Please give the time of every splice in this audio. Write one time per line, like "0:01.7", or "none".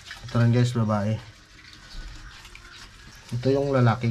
0:03.1